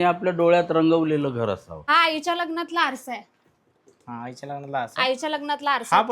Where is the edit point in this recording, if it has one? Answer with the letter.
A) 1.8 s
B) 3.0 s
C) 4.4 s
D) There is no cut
A